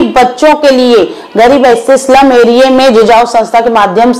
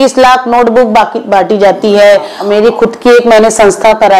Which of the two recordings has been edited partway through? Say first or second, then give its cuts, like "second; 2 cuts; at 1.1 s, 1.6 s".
second; 1 cut; at 2.4 s